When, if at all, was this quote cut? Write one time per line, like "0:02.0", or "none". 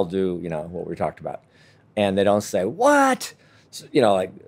0:01.8